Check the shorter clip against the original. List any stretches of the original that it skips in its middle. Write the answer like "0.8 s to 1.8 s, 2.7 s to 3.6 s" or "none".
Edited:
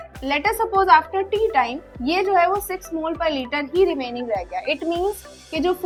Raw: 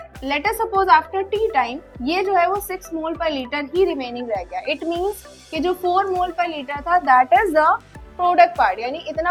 none